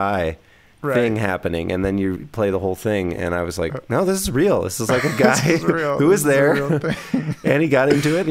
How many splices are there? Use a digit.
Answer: 0